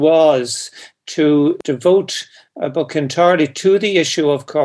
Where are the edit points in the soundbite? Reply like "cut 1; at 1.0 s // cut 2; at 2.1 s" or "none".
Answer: cut 1; at 1.6 s